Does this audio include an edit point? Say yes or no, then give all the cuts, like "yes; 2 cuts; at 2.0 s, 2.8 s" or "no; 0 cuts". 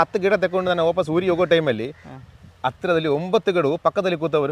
no; 0 cuts